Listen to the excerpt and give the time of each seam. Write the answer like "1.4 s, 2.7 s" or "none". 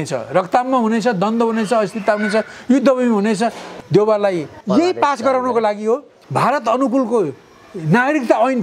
3.7 s, 4.6 s, 6.2 s